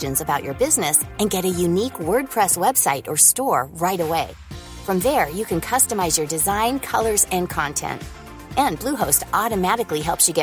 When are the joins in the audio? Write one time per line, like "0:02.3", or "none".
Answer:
none